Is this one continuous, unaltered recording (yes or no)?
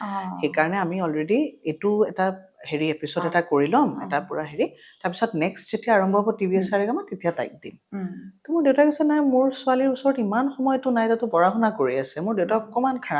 yes